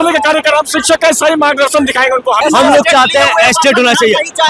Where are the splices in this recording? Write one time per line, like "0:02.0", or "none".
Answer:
0:02.4